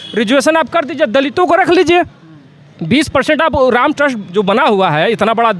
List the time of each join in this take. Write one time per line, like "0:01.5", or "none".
none